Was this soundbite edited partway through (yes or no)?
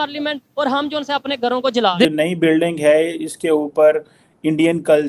yes